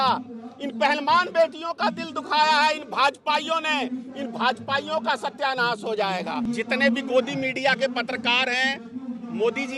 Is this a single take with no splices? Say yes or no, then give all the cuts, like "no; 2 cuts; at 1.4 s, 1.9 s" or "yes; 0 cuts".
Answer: no; 1 cut; at 6.5 s